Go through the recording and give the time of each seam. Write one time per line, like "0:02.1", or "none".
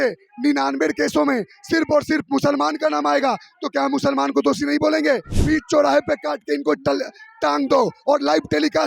0:05.3